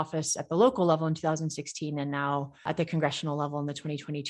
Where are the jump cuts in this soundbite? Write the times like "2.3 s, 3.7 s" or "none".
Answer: 2.7 s